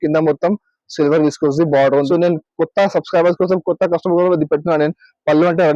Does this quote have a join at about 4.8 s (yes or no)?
no